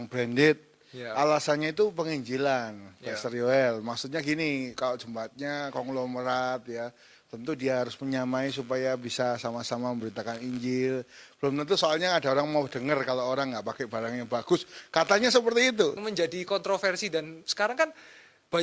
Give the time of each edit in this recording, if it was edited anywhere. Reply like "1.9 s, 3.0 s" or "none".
16.0 s